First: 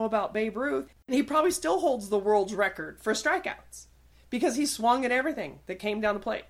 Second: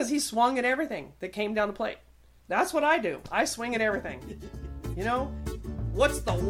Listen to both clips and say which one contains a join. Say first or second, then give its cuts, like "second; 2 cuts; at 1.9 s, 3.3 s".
first; 1 cut; at 1.1 s